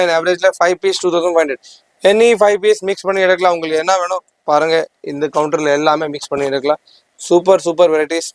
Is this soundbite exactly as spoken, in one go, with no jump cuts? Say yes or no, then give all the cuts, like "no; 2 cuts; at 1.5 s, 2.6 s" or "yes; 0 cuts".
yes; 0 cuts